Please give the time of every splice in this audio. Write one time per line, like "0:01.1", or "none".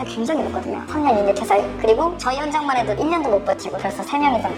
none